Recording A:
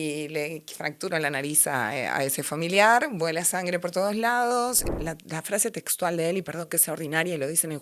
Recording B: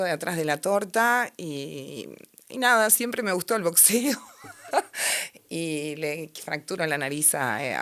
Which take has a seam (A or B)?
A